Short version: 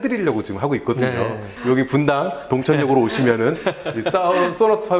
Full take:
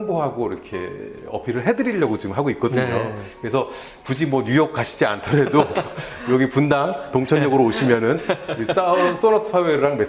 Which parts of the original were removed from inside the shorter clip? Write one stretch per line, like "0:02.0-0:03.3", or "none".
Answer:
0:03.2-0:06.1